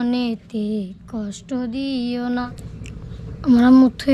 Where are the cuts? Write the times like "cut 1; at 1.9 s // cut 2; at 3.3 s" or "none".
cut 1; at 2.2 s